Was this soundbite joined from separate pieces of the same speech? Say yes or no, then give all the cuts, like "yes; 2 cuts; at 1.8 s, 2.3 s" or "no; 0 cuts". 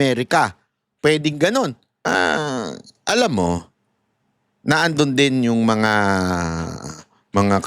yes; 1 cut; at 1.9 s